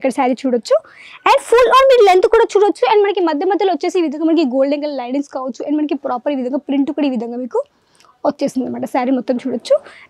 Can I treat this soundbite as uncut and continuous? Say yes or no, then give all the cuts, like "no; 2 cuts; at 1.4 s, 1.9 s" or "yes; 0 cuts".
yes; 0 cuts